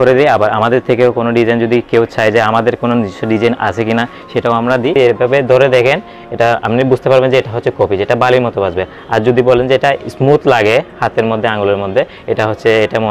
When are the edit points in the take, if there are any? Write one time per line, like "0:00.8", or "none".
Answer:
0:04.9